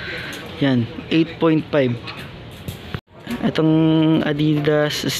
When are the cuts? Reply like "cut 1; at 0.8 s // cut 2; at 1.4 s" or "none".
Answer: cut 1; at 3.0 s